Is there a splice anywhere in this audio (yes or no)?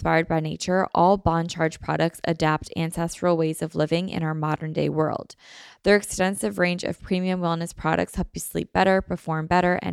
no